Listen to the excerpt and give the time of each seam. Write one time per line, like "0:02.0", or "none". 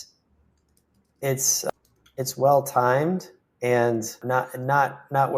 0:01.7
0:04.2